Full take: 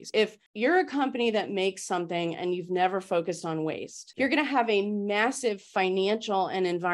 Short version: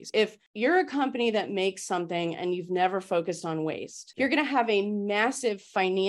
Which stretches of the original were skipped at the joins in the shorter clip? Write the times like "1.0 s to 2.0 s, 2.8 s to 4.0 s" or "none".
none